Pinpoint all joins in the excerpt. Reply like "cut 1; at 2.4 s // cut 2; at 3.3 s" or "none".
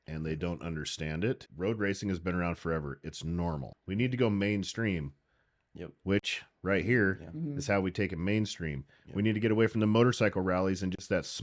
cut 1; at 1.5 s // cut 2; at 3.7 s